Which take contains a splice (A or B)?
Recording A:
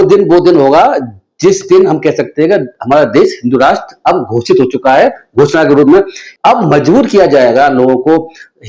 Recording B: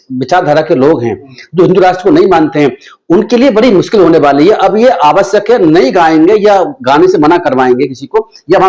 A